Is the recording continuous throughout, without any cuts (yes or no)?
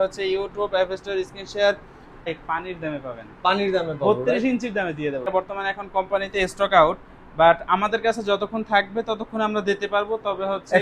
no